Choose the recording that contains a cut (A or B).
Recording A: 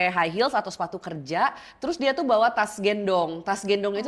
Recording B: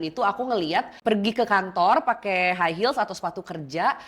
B